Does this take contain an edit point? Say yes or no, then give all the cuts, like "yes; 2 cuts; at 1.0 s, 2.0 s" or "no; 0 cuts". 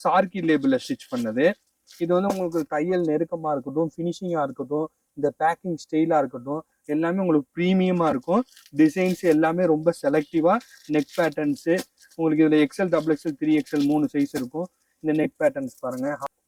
no; 0 cuts